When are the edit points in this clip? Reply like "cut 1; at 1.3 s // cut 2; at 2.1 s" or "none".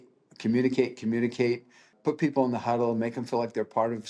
cut 1; at 1.9 s

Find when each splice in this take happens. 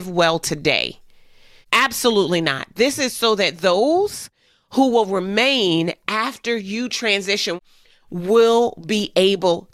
cut 1; at 7.6 s

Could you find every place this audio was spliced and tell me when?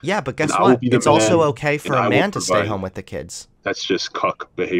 cut 1; at 3.4 s

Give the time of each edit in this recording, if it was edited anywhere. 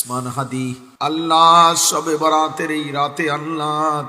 cut 1; at 1.0 s

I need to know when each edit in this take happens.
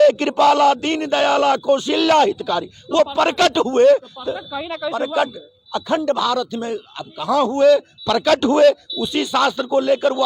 none

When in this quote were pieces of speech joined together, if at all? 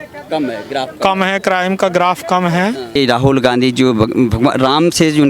cut 1; at 2.9 s

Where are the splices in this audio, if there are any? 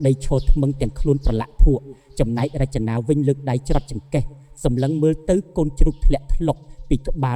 none

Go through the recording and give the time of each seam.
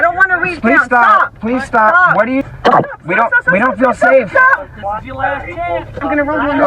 cut 1; at 2.5 s

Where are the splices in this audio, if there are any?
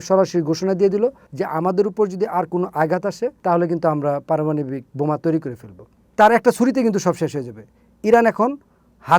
cut 1; at 3.4 s // cut 2; at 4.8 s // cut 3; at 6.0 s

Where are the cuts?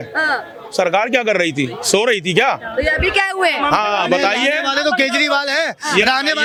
none

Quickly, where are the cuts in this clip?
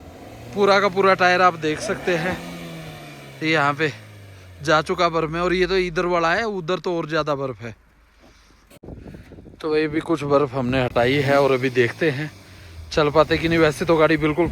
cut 1; at 8.7 s

